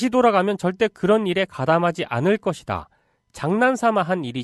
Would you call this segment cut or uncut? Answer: uncut